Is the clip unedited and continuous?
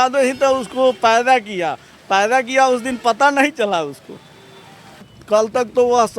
no; 1 cut; at 5.0 s

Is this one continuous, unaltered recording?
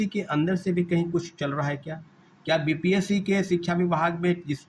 yes; 0 cuts

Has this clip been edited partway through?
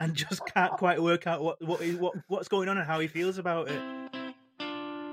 yes; 1 cut; at 3.8 s

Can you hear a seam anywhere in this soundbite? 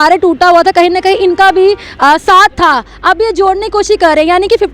no; 0 cuts

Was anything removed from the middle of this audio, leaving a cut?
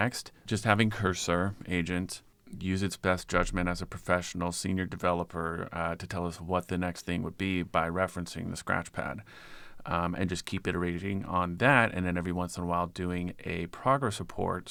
no; 0 cuts

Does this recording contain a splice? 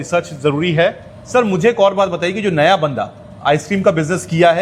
yes; 1 cut; at 1.3 s

